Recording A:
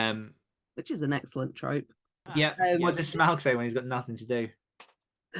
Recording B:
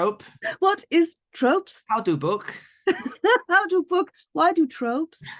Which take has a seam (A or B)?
A